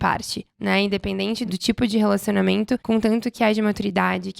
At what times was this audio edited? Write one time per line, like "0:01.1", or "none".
0:01.4
0:02.8